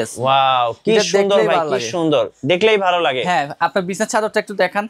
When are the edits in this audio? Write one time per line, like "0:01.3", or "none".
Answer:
none